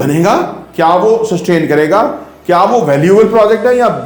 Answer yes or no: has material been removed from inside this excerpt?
no